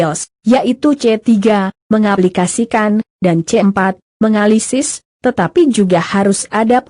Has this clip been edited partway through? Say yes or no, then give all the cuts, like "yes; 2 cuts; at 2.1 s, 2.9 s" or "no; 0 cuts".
yes; 1 cut; at 1.0 s